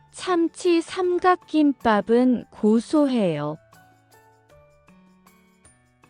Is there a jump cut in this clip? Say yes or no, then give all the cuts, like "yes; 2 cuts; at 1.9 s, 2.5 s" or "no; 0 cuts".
yes; 1 cut; at 3.6 s